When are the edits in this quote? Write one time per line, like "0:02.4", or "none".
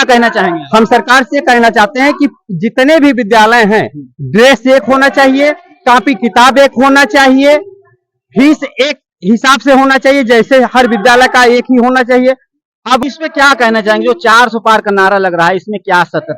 0:13.0